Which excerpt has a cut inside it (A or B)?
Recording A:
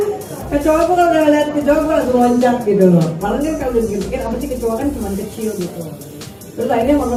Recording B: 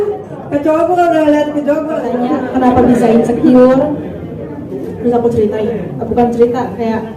B